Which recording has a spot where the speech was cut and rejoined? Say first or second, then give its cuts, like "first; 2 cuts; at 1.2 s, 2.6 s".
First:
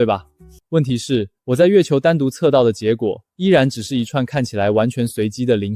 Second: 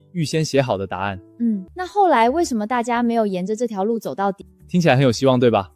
second; 2 cuts; at 1.7 s, 4.5 s